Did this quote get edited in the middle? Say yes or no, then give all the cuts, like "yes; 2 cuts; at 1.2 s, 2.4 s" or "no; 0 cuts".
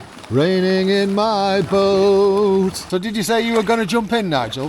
yes; 1 cut; at 2.8 s